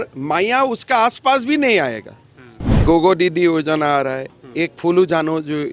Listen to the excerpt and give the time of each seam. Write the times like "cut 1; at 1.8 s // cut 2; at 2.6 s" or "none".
cut 1; at 2.8 s